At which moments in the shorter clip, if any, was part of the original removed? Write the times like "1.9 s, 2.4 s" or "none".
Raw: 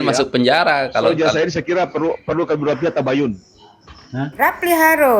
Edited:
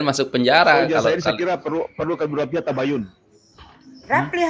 1.0 s